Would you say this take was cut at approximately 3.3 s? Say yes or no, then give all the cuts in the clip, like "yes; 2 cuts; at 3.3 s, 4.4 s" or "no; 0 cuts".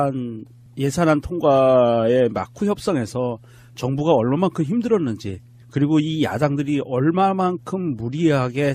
no; 1 cut; at 1.9 s